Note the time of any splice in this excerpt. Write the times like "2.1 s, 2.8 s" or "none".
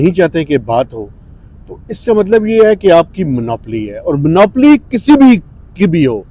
none